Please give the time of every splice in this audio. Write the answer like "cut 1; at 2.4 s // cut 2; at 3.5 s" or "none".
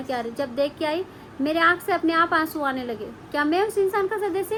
none